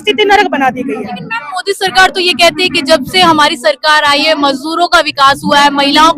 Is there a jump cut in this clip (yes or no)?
no